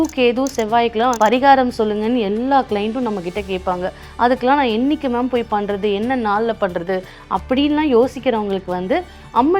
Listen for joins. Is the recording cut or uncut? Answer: cut